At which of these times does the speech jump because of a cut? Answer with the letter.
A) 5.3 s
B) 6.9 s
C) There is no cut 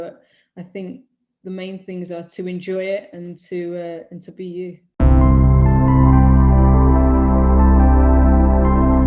A